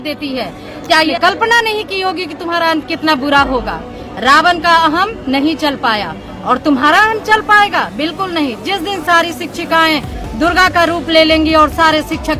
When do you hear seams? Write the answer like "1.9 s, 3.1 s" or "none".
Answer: 1.1 s